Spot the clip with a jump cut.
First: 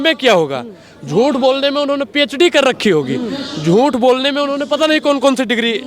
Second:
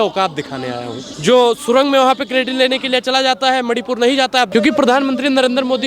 second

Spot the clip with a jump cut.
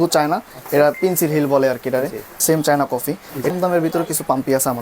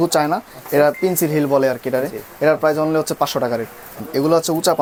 first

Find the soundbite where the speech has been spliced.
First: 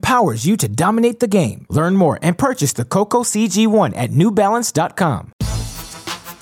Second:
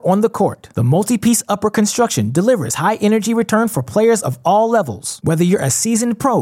first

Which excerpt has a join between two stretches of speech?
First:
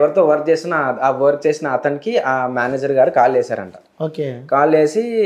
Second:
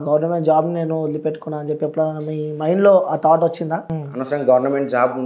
second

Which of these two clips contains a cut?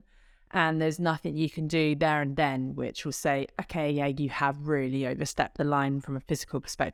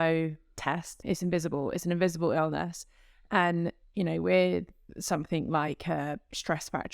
second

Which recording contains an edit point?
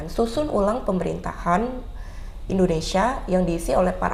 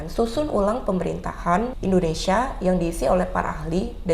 second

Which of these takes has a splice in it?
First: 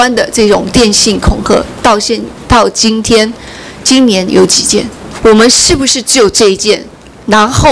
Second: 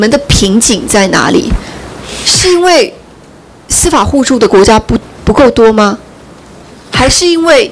first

